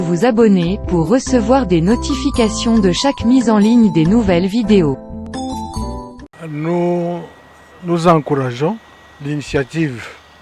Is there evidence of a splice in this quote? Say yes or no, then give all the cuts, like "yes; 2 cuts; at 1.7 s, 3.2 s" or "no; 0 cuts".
yes; 1 cut; at 6.4 s